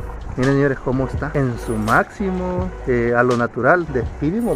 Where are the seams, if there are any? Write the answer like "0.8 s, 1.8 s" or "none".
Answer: 1.2 s, 2.8 s